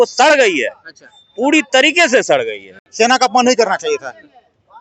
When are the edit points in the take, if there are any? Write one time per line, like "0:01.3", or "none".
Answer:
0:02.8